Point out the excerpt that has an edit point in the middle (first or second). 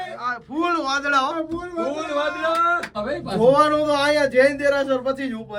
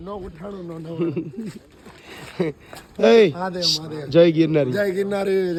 first